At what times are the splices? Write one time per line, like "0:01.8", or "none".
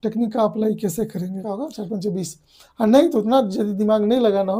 0:01.4